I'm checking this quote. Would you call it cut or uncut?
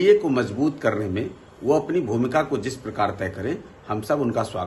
uncut